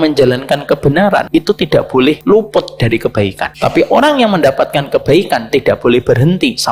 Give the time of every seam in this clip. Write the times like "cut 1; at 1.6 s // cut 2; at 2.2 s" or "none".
cut 1; at 1.3 s // cut 2; at 2.2 s // cut 3; at 3.5 s